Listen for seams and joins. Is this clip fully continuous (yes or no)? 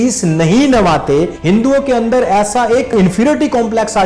no